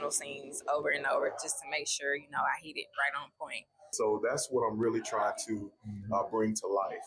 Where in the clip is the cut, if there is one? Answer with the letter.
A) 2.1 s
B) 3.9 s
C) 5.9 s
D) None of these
B